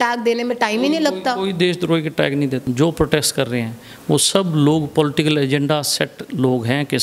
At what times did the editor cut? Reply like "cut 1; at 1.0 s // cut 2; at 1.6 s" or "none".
cut 1; at 2.6 s